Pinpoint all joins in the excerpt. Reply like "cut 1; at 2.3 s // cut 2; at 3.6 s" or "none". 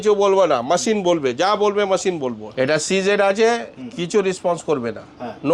cut 1; at 2.4 s